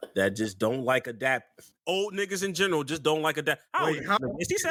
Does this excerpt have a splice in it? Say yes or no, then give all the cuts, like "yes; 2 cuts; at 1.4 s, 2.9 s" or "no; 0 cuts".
no; 0 cuts